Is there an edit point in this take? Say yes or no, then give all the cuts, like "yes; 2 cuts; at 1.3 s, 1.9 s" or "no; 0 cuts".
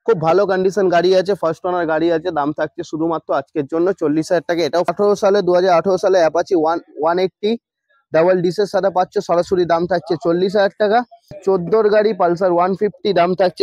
yes; 2 cuts; at 4.9 s, 11.4 s